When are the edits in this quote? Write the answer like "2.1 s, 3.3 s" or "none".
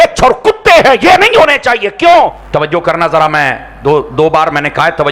2.4 s